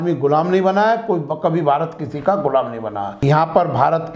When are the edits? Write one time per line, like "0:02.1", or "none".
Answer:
0:03.1